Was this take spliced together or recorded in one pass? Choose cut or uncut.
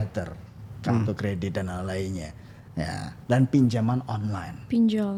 uncut